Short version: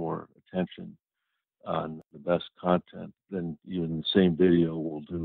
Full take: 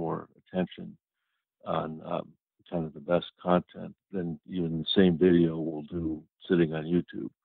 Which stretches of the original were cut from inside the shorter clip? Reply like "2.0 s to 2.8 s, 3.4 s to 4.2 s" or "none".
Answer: 2.1 s to 2.9 s